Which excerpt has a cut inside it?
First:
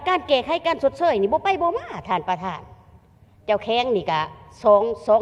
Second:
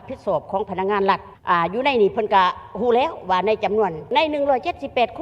second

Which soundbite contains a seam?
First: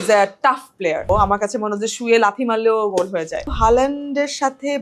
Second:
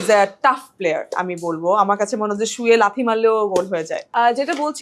first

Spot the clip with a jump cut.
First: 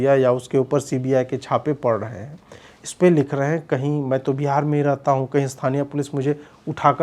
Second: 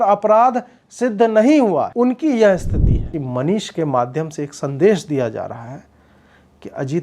second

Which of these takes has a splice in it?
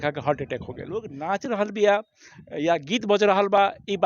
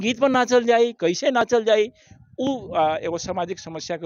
first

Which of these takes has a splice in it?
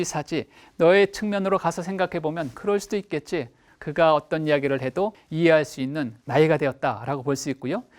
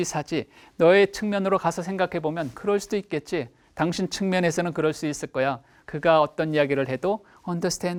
first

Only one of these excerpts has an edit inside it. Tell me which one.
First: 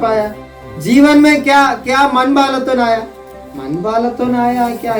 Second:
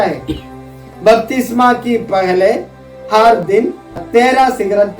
second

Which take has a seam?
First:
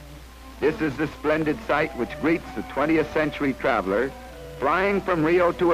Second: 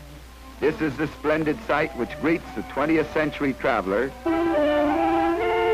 first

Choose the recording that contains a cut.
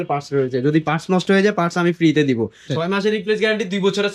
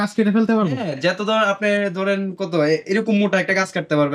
first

